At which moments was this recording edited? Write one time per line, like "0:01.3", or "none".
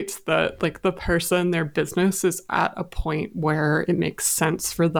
none